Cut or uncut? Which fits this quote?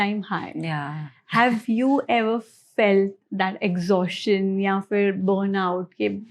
uncut